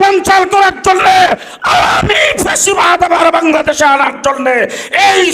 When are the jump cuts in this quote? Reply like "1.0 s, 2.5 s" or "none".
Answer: none